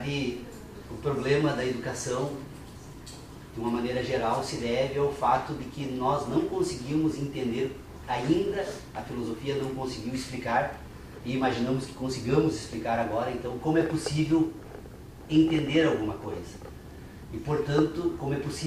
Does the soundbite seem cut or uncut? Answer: cut